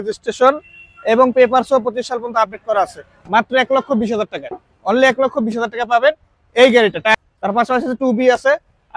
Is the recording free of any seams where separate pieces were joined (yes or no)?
no